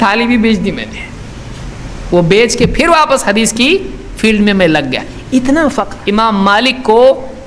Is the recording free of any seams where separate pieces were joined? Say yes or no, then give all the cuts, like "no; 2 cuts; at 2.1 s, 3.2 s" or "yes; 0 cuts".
no; 1 cut; at 5.9 s